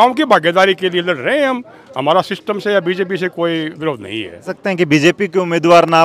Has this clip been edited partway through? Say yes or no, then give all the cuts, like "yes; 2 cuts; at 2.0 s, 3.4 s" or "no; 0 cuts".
yes; 1 cut; at 4.5 s